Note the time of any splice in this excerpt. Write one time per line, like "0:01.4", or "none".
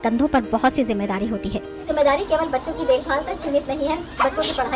0:01.8